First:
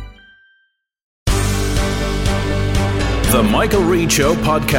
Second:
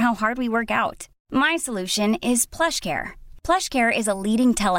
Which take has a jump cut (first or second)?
first